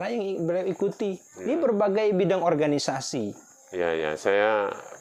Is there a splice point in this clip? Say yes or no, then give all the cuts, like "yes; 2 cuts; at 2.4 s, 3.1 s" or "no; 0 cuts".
no; 0 cuts